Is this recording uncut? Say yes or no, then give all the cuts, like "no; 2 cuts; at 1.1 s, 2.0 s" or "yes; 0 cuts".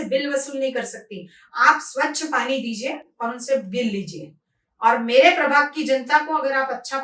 yes; 0 cuts